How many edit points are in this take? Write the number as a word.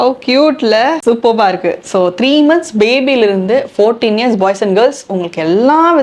one